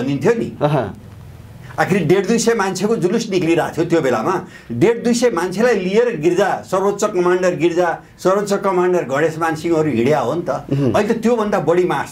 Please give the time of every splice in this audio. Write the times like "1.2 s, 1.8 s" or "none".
none